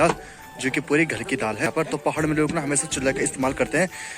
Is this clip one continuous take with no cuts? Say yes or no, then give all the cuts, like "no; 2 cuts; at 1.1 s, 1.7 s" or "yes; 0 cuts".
no; 1 cut; at 1.7 s